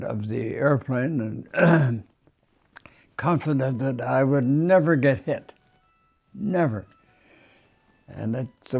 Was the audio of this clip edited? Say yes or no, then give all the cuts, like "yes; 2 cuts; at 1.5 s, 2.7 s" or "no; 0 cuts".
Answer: no; 0 cuts